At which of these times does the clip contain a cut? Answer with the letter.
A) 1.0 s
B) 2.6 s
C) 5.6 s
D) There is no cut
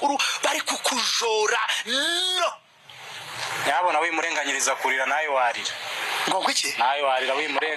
D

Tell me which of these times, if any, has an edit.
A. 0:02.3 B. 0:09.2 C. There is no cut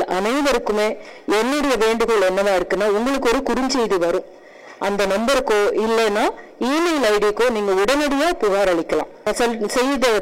B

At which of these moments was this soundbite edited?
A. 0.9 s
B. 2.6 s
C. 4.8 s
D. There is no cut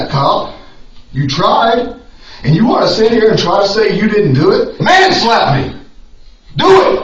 C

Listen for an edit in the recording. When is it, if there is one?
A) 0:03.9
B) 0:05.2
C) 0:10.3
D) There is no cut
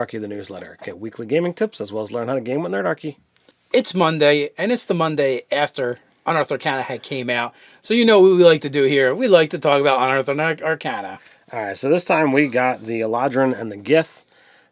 C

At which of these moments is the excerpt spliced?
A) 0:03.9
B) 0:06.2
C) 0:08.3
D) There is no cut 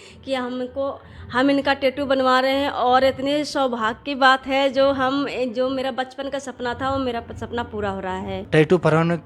C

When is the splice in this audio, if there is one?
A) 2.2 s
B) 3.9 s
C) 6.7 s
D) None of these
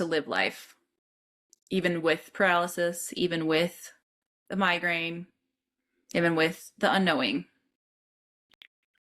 D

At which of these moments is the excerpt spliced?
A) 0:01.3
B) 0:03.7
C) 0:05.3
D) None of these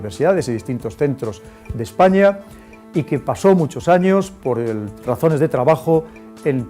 B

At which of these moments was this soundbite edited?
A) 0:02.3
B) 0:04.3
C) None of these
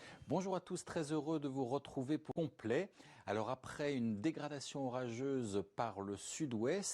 A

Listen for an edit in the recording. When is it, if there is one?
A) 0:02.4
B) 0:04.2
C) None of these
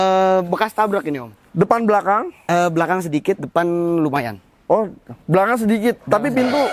C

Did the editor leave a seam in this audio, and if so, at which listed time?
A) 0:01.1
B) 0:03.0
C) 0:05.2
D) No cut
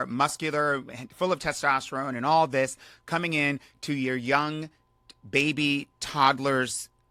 D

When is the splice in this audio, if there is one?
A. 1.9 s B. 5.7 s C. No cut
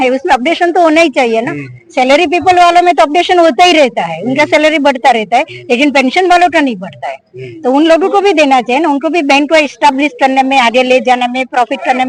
C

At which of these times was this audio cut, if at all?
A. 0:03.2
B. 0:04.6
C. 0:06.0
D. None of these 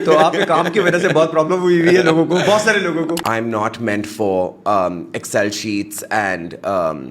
A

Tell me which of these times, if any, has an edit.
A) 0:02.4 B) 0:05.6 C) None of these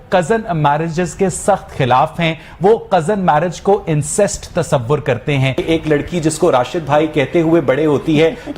B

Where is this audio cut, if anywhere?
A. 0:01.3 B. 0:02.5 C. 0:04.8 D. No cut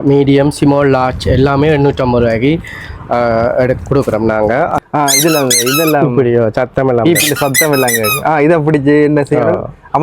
C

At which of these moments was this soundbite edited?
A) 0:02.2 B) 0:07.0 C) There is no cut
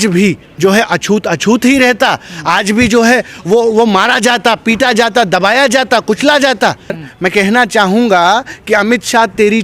B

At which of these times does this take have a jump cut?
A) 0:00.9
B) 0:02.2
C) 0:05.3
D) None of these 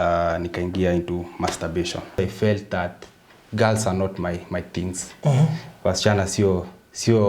B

